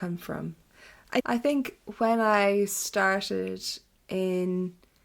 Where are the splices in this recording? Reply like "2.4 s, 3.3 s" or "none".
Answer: 1.2 s